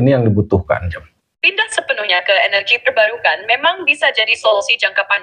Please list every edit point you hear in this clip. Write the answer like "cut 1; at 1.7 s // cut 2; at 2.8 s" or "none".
none

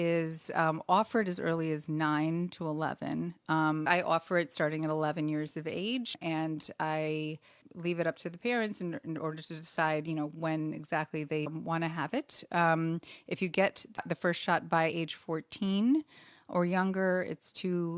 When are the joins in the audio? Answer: cut 1; at 3.9 s // cut 2; at 6.2 s // cut 3; at 7.7 s // cut 4; at 11.5 s // cut 5; at 14.0 s

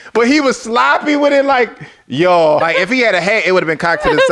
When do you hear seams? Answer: cut 1; at 2.6 s

